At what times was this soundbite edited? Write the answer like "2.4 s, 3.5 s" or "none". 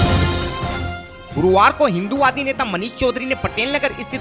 1.1 s